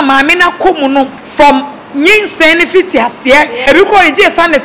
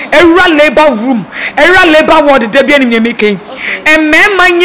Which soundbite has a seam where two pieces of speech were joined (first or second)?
first